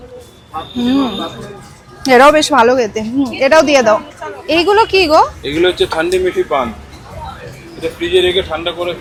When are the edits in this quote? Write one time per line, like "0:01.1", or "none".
none